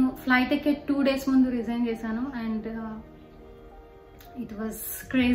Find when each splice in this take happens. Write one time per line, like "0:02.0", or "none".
none